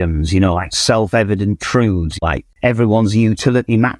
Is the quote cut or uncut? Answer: cut